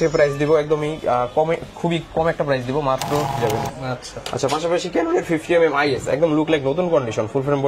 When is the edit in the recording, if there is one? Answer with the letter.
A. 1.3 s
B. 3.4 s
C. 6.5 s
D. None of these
B